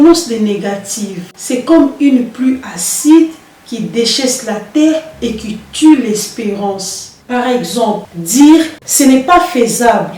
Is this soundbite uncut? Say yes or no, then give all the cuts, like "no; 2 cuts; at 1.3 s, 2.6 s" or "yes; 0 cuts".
yes; 0 cuts